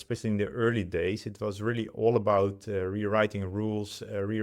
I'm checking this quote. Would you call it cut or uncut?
uncut